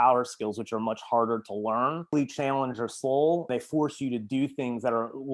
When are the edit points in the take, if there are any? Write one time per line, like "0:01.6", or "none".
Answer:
0:02.1
0:03.5